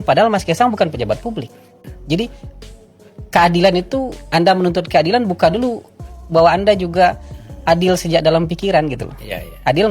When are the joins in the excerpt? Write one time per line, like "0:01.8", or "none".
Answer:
0:01.9